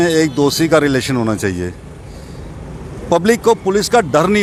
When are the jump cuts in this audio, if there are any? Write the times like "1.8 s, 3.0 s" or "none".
none